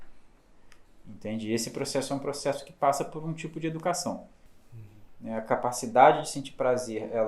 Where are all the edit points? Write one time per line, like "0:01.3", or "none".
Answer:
0:04.4